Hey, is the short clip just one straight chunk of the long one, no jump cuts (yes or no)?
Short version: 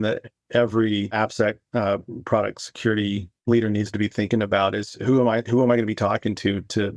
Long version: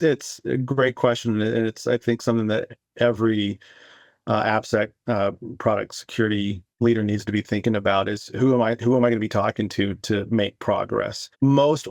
no